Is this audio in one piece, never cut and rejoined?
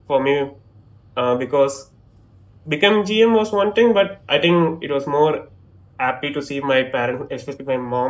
yes; 0 cuts

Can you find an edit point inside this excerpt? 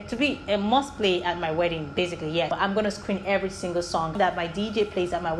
yes; 2 cuts; at 2.5 s, 4.1 s

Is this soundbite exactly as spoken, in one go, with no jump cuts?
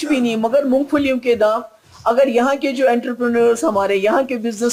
yes; 0 cuts

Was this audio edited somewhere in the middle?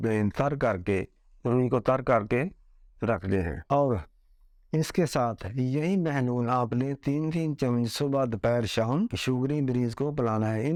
no; 0 cuts

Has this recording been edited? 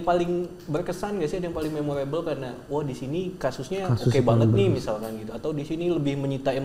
no; 0 cuts

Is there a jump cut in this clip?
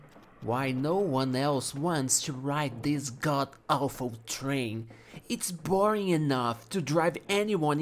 no; 0 cuts

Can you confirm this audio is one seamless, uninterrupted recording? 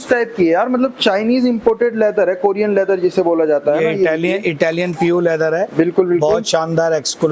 yes; 0 cuts

